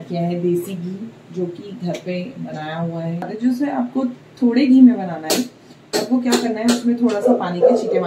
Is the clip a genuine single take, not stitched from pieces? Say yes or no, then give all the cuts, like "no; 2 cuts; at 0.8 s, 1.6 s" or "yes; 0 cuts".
no; 1 cut; at 3.3 s